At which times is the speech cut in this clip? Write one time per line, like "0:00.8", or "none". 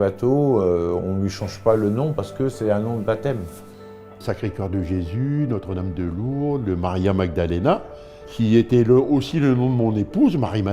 0:04.2
0:08.2